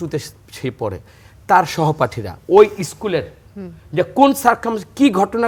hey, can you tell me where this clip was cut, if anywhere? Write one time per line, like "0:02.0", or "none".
none